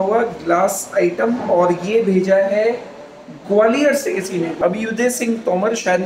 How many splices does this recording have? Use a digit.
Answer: 0